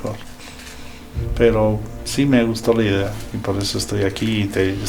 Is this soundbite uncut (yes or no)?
yes